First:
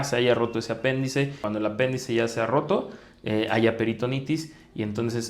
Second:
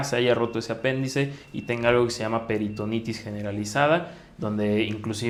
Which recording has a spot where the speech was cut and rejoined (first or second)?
first